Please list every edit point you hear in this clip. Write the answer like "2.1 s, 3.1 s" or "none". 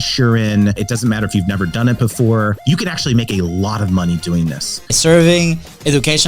0.8 s, 2.6 s, 4.9 s